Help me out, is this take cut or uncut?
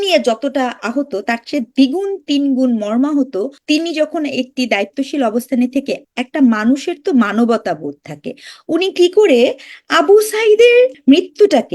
cut